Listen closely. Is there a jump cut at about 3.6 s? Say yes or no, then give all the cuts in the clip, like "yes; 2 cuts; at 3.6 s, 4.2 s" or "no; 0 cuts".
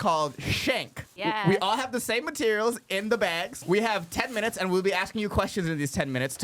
yes; 2 cuts; at 1.0 s, 3.6 s